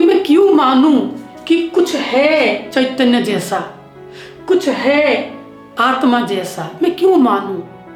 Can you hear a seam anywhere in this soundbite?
no; 0 cuts

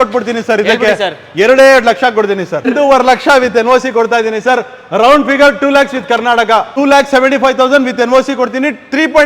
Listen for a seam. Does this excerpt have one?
yes; 2 cuts; at 2.6 s, 6.7 s

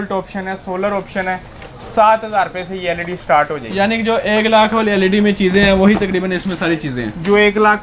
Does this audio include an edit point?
no; 0 cuts

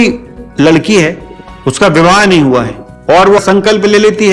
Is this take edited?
yes; 1 cut; at 3.4 s

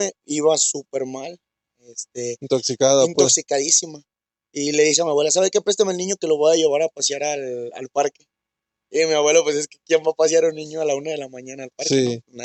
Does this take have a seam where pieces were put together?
no; 0 cuts

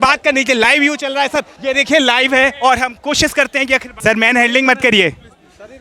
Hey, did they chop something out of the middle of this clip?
yes; 2 cuts; at 1.5 s, 3.9 s

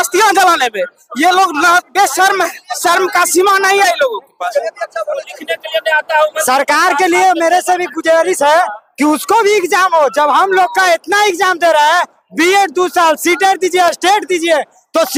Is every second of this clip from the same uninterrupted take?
yes; 0 cuts

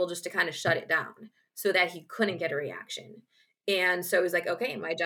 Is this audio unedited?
yes; 0 cuts

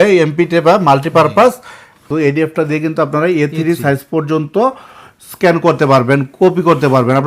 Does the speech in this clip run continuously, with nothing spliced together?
no; 1 cut; at 2.0 s

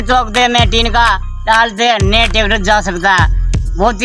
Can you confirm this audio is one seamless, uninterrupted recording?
yes; 0 cuts

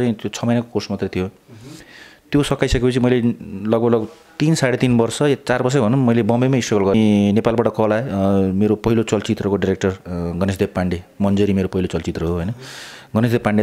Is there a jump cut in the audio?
yes; 1 cut; at 6.9 s

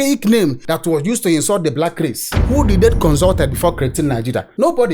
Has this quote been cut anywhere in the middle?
yes; 1 cut; at 2.3 s

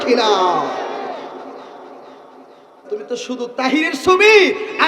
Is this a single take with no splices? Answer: no; 1 cut; at 2.7 s

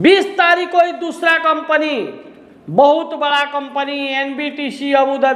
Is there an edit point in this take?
no; 0 cuts

